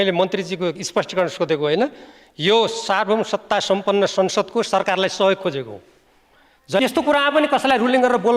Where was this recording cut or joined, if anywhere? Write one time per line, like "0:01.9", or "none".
0:06.8